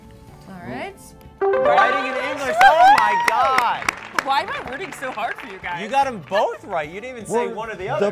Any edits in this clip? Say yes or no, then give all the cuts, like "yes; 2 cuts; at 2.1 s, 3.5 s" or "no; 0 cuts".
no; 0 cuts